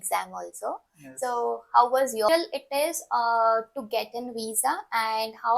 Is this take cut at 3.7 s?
no; 1 cut; at 2.3 s

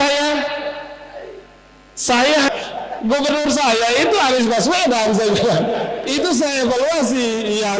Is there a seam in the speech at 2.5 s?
yes; 1 cut; at 2.5 s

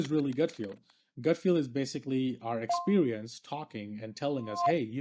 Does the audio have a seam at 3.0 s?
no; 0 cuts

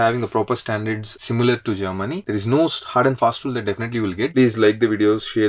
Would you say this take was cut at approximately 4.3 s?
yes; 2 cuts; at 2.2 s, 4.3 s

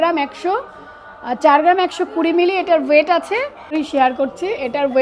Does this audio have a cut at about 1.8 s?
no; 1 cut; at 3.7 s

